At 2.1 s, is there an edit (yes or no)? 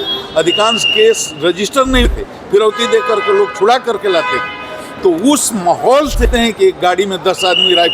yes